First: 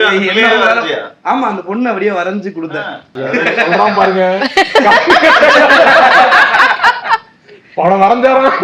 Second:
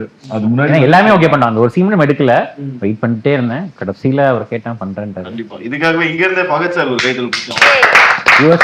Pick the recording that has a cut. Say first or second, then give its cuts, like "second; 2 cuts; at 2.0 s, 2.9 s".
first; 1 cut; at 3.1 s